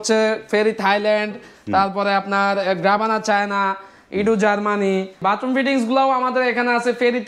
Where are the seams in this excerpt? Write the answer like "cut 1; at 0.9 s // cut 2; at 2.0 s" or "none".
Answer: cut 1; at 5.1 s